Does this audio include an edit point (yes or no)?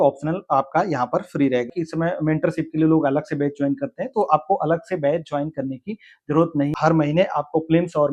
yes